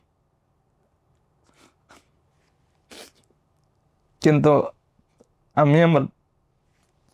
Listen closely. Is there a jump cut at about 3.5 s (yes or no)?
no